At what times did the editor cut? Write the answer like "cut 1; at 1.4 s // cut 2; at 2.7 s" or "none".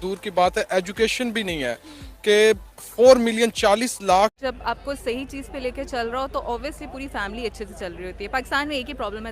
cut 1; at 4.4 s